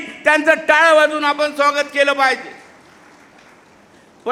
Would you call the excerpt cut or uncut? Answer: uncut